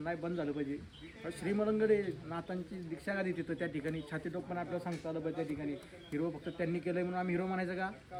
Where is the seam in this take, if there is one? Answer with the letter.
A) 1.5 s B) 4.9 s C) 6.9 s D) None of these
D